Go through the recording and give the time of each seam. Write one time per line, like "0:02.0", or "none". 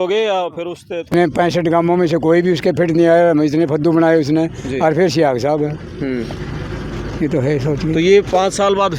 0:01.1